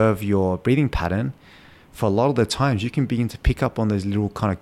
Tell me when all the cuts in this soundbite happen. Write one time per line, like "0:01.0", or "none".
none